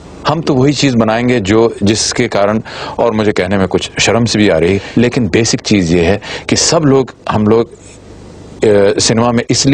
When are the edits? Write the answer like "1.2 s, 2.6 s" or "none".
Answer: 4.9 s

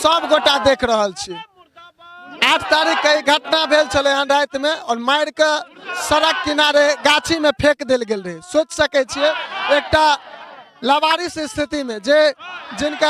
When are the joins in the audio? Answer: none

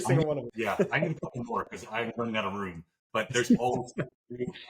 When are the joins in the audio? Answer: 1.0 s

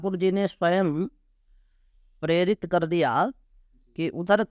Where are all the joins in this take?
none

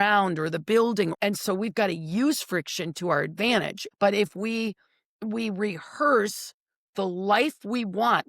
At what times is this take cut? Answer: 1.1 s, 3.8 s

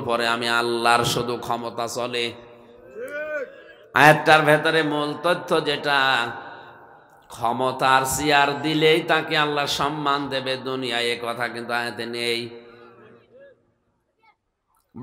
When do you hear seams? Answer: none

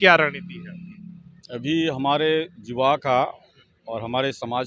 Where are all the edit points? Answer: none

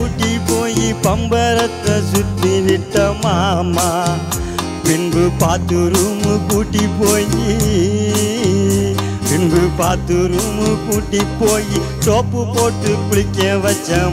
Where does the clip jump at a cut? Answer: none

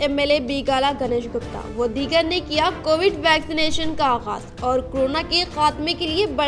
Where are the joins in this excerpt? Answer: none

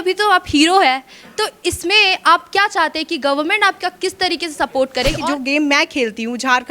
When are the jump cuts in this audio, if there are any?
5.2 s

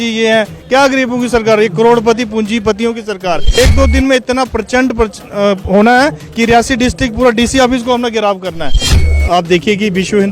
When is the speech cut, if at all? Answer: 3.6 s, 8.8 s

